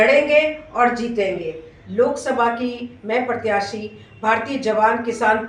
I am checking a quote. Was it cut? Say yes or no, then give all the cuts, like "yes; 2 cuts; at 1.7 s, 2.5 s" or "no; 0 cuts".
yes; 1 cut; at 1.8 s